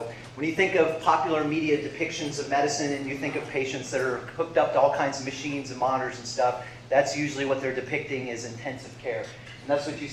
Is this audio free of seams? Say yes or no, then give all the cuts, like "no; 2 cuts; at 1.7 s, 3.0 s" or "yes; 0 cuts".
yes; 0 cuts